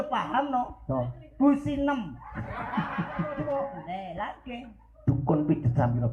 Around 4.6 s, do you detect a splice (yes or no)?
no